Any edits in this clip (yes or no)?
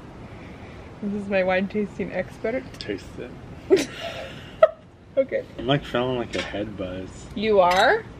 yes